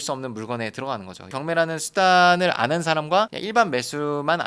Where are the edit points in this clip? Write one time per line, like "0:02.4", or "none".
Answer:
0:01.2